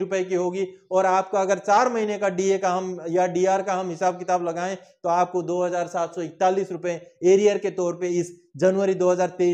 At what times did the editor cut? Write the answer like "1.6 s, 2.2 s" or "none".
none